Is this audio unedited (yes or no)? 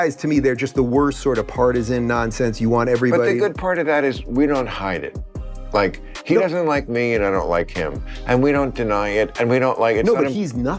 yes